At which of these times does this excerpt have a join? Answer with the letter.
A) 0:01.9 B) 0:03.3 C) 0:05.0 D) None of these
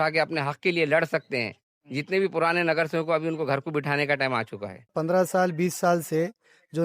C